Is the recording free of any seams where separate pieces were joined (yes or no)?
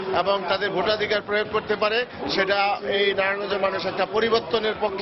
yes